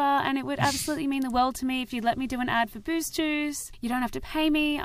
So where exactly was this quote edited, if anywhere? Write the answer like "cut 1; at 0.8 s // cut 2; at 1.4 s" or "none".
none